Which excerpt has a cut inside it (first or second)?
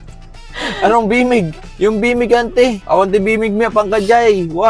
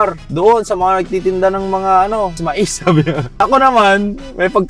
first